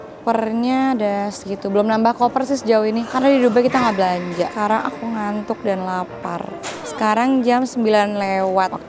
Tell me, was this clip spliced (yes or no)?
no